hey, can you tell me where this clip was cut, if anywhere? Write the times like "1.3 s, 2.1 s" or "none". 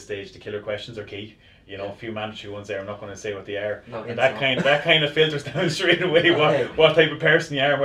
none